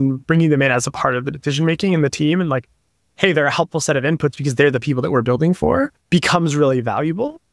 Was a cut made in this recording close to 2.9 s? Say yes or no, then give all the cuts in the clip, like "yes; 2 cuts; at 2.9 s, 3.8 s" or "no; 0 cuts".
no; 1 cut; at 6.0 s